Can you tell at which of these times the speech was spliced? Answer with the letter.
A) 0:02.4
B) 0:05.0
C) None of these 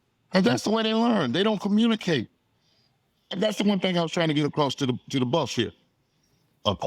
C